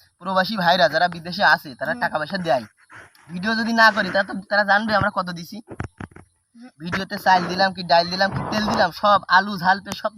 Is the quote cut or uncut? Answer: uncut